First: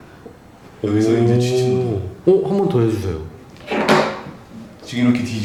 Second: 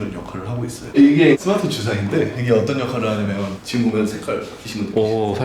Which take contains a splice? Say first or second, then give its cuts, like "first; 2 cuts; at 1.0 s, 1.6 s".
second; 1 cut; at 0.9 s